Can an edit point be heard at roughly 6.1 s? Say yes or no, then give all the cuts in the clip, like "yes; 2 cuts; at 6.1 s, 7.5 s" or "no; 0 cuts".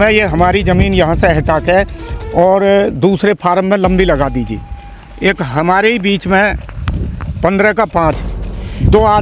no; 0 cuts